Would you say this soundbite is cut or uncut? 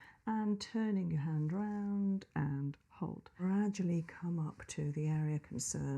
cut